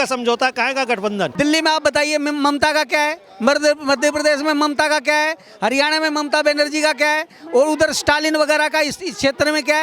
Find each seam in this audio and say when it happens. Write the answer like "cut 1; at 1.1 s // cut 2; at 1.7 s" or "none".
cut 1; at 1.3 s